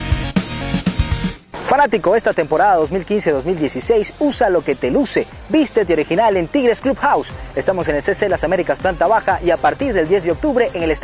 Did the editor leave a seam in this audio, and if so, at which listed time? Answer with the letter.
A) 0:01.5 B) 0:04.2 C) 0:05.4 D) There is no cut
A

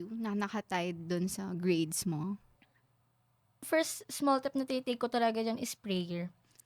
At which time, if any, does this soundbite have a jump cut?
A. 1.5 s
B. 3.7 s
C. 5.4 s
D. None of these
B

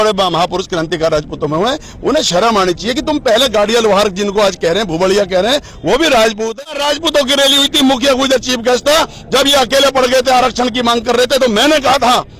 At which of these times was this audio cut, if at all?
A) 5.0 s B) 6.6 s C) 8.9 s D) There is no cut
B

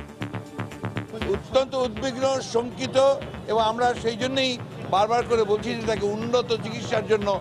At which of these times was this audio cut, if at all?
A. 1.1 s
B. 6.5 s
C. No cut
A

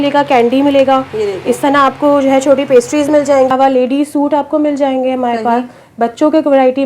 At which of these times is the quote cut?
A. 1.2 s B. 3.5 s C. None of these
B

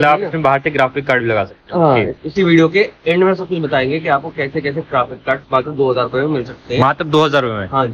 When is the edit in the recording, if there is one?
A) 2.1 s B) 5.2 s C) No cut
A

